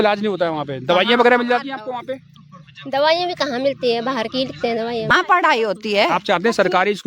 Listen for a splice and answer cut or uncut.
cut